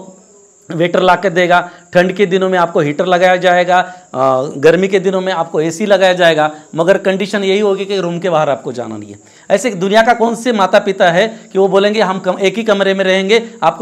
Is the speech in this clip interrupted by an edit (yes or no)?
no